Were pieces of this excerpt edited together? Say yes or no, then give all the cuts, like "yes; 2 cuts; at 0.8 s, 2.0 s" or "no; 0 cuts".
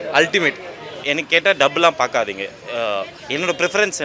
yes; 1 cut; at 1.0 s